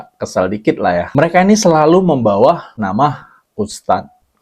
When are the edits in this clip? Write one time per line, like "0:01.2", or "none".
0:01.1